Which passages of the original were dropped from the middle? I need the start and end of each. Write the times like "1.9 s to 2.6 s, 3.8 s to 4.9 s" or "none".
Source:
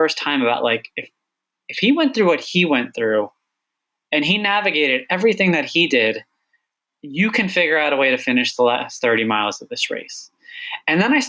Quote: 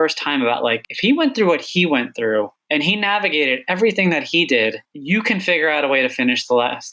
0.9 s to 1.7 s, 3.4 s to 4.0 s, 6.3 s to 7.0 s